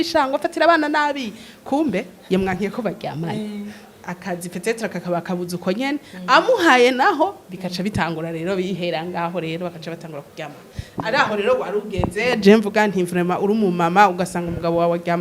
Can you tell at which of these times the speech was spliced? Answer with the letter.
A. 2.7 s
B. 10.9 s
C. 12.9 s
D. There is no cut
D